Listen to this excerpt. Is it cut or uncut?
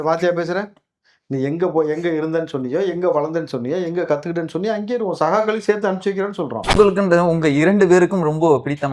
cut